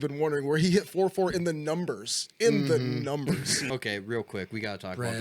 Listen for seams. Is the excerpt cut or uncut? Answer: cut